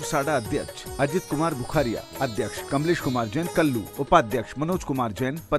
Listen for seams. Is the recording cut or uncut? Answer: cut